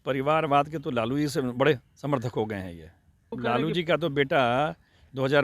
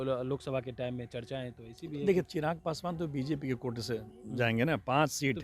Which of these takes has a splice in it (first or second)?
first